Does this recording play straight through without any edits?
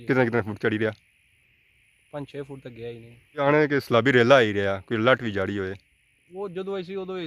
no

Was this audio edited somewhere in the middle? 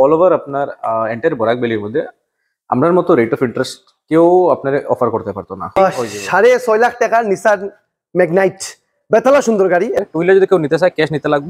yes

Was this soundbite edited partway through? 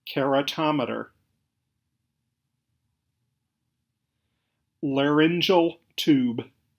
no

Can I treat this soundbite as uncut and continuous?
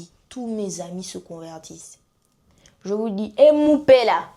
yes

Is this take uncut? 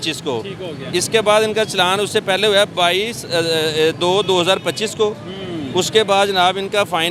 yes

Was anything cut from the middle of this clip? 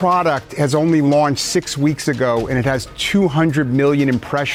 no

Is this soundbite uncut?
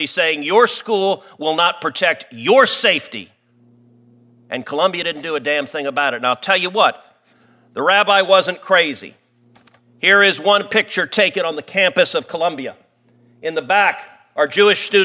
yes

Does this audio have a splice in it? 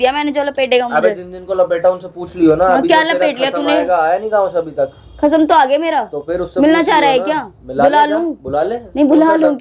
no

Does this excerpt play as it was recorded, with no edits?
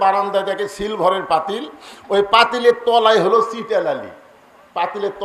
yes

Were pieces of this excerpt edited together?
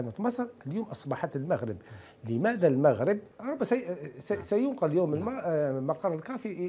yes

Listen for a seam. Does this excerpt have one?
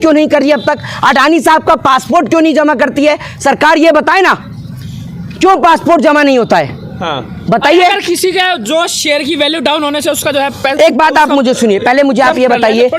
no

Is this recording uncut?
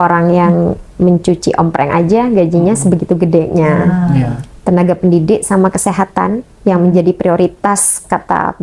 yes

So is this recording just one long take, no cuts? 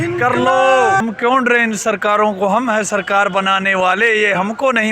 no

